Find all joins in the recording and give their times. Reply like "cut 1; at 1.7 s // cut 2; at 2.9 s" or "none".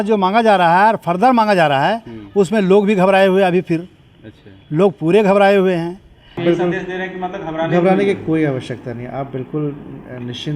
cut 1; at 6.4 s